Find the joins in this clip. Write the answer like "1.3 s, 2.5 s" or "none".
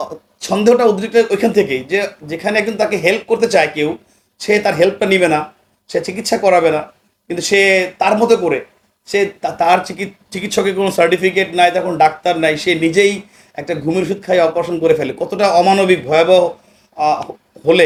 none